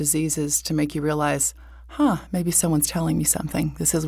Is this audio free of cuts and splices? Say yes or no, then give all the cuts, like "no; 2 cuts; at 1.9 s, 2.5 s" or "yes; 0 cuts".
yes; 0 cuts